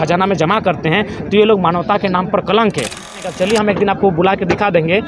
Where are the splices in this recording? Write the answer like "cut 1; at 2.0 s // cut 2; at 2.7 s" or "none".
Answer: cut 1; at 3.1 s